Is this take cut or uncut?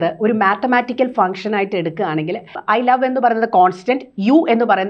cut